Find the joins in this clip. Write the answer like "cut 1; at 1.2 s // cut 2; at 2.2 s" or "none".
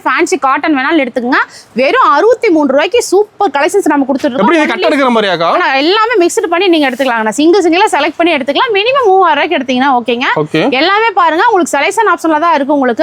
none